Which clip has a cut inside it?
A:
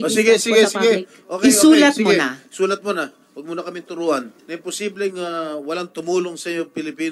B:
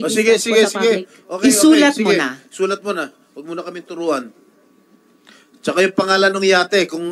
A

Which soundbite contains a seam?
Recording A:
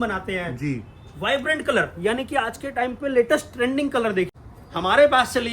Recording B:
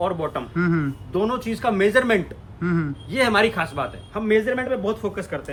A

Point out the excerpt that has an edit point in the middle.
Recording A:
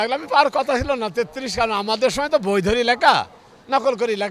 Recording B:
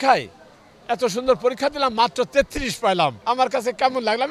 B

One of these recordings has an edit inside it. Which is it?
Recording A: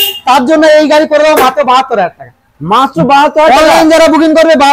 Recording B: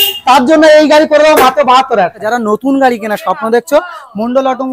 B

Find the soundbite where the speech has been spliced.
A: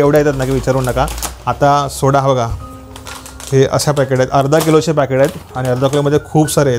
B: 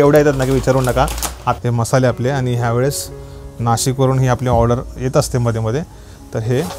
B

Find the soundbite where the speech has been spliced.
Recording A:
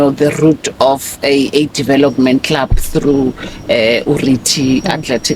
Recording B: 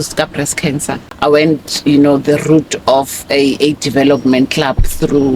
B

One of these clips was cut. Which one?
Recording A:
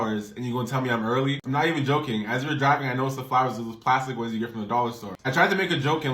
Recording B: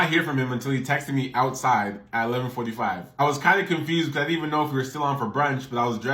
A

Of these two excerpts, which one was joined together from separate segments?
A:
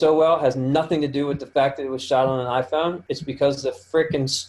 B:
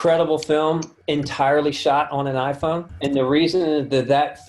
B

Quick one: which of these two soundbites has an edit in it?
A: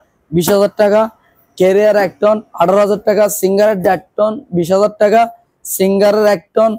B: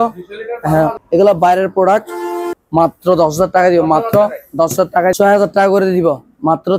B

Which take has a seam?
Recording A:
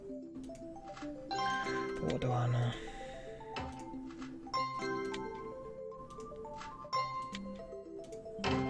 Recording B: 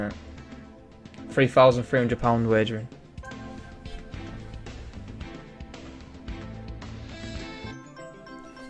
A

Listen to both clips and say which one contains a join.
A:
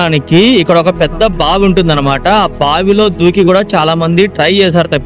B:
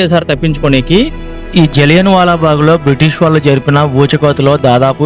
B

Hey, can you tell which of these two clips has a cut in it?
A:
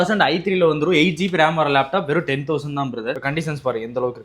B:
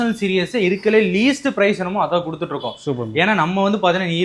A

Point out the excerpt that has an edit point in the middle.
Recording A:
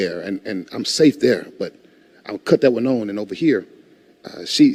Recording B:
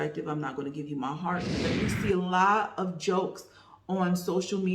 B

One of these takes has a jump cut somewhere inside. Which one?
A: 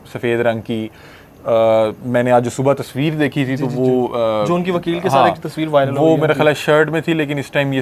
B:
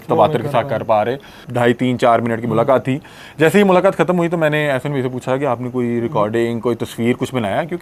B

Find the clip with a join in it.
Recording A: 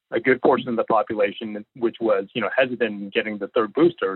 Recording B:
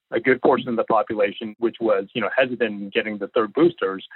B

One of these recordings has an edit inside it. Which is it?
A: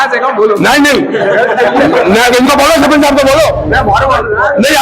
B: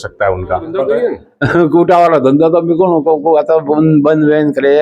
B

